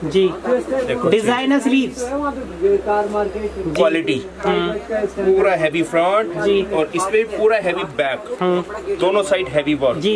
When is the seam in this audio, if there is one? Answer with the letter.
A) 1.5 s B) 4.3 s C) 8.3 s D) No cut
D